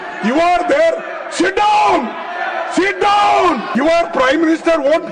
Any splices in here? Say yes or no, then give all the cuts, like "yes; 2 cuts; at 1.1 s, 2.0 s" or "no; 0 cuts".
yes; 1 cut; at 3.7 s